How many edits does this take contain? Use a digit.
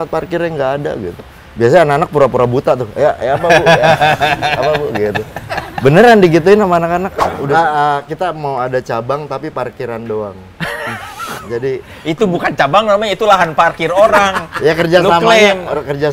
1